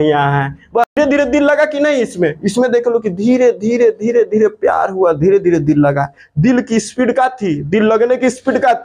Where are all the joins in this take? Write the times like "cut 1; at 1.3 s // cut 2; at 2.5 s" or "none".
cut 1; at 1.0 s